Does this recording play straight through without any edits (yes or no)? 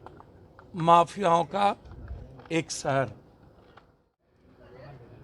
no